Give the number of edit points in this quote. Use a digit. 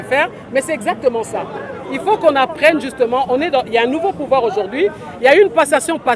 0